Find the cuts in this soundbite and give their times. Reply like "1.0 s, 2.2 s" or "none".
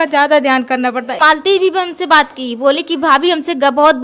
1.1 s